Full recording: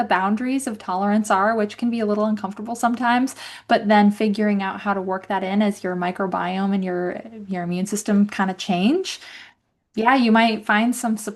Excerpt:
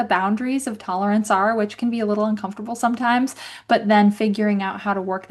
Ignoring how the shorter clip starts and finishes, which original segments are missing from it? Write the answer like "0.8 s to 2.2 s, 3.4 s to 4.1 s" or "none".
none